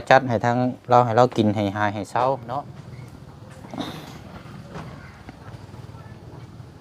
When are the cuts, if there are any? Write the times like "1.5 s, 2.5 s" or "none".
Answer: 2.5 s